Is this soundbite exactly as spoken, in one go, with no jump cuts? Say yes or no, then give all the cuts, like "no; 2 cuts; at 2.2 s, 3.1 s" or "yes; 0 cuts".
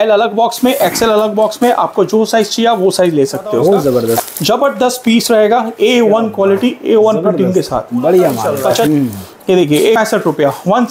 no; 3 cuts; at 4.2 s, 8.9 s, 10.0 s